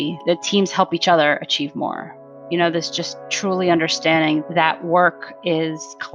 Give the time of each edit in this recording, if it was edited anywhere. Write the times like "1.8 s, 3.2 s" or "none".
none